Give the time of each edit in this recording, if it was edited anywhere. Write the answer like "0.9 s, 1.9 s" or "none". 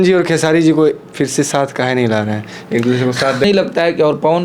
3.5 s